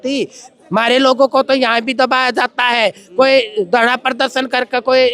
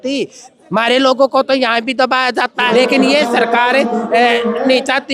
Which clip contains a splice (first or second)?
second